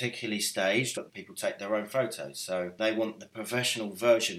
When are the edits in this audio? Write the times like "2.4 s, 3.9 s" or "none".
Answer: 0.9 s, 2.7 s